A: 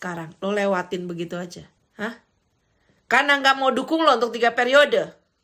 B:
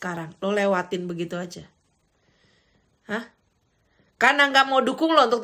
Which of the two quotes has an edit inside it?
A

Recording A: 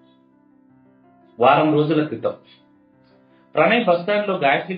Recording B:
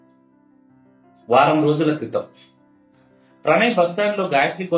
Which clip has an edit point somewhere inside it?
B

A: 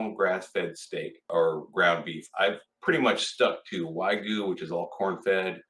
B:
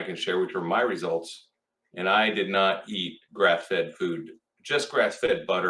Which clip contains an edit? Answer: A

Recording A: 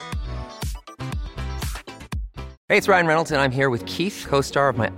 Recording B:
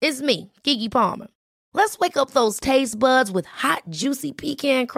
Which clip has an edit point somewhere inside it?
A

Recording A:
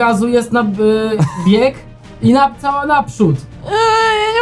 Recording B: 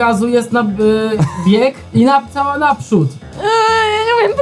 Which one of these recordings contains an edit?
B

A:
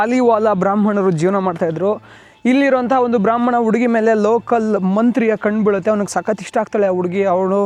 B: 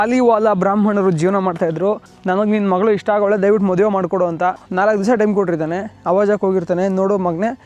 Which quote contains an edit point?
B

